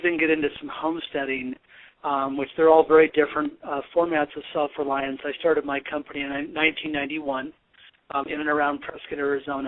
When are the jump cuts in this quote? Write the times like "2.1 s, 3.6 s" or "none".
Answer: 8.3 s